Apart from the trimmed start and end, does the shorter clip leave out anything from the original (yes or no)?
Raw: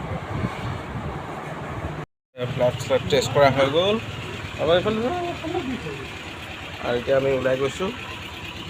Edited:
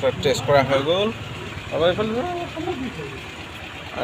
no